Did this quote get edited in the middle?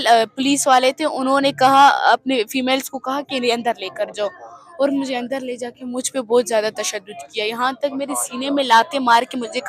no; 0 cuts

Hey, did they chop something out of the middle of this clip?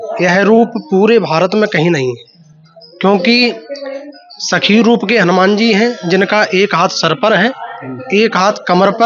no; 0 cuts

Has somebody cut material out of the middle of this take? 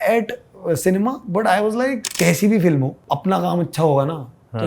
yes; 2 cuts; at 2.1 s, 3.0 s

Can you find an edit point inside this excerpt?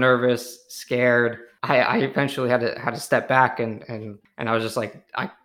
yes; 2 cuts; at 1.5 s, 4.2 s

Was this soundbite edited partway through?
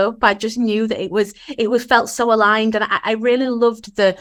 no; 0 cuts

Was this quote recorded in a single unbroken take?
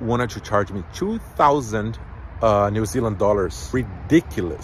no; 1 cut; at 3.6 s

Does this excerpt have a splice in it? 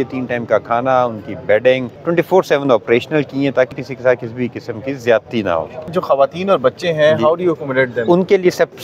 yes; 3 cuts; at 1.9 s, 3.8 s, 6.0 s

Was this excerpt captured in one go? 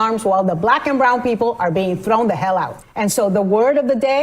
no; 1 cut; at 2.8 s

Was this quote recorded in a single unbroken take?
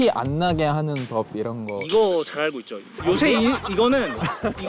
yes; 0 cuts

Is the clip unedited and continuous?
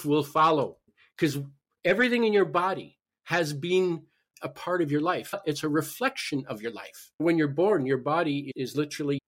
no; 1 cut; at 0.9 s

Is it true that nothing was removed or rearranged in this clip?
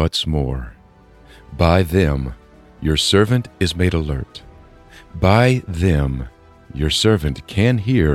yes; 0 cuts

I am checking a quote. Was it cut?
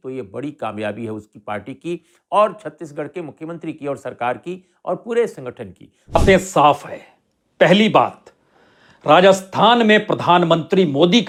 no; 0 cuts

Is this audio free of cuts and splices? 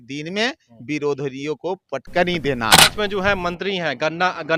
no; 1 cut; at 2.9 s

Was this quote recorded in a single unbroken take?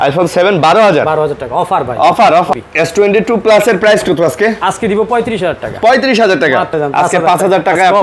no; 2 cuts; at 2.5 s, 6.7 s

